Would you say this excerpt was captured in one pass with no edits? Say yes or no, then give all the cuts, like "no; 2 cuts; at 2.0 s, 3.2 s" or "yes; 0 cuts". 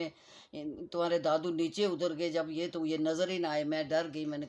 yes; 0 cuts